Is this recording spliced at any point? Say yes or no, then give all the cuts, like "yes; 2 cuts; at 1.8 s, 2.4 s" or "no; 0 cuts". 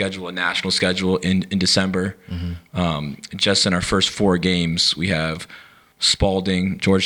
no; 0 cuts